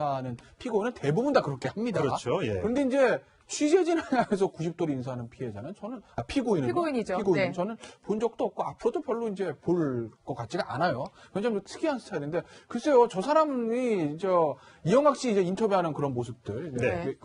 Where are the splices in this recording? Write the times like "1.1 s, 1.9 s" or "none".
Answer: 15.8 s